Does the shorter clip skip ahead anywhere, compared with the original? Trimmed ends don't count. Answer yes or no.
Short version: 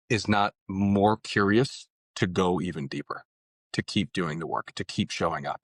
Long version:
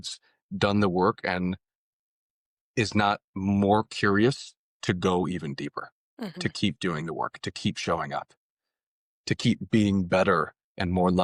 no